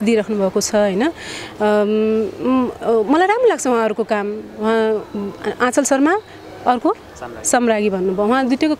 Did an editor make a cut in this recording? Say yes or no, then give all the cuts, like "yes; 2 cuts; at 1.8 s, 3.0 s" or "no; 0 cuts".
no; 0 cuts